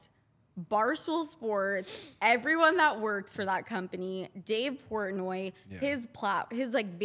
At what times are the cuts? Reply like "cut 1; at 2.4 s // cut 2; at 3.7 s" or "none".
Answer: none